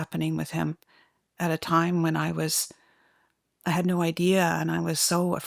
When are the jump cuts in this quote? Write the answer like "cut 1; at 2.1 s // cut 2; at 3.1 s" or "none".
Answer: none